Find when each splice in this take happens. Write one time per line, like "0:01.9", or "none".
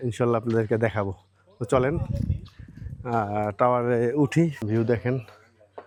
none